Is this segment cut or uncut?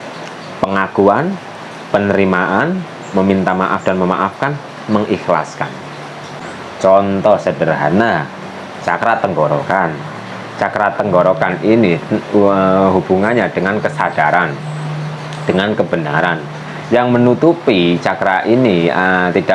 cut